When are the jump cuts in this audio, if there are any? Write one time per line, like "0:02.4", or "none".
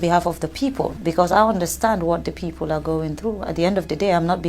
0:01.0